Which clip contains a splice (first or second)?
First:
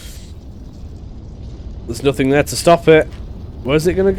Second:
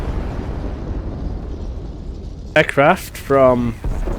second